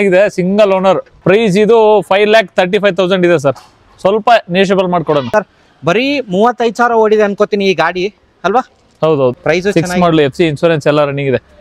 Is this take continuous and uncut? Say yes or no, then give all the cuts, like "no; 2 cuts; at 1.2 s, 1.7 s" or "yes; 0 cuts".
no; 3 cuts; at 1.1 s, 5.3 s, 9.4 s